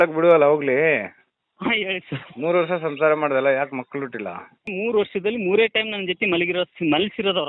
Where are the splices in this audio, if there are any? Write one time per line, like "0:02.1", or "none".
0:04.7